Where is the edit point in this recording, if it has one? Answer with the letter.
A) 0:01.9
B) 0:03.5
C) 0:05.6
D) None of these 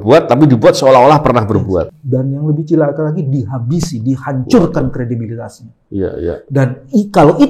A